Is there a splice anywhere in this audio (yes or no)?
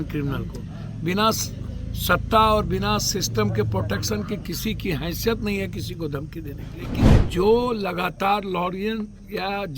yes